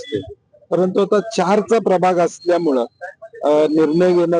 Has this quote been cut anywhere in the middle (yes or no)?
no